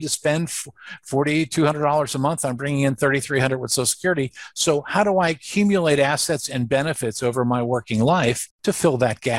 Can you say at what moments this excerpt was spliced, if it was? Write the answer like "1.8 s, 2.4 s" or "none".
8.5 s